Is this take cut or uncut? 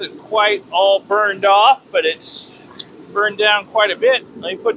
uncut